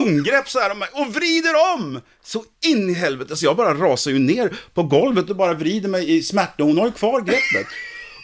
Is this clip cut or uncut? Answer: cut